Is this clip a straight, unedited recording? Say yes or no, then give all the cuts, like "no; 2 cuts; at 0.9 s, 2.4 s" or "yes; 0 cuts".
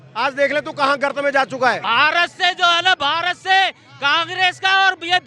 no; 1 cut; at 1.8 s